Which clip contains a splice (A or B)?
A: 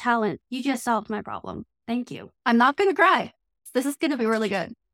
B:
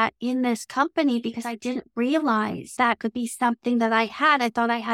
A